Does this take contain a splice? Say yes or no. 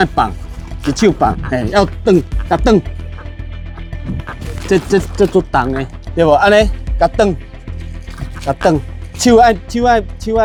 no